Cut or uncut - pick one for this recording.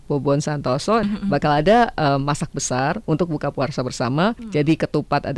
cut